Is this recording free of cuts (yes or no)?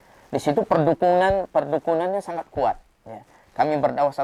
yes